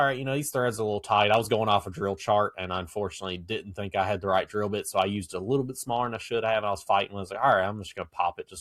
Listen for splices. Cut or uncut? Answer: uncut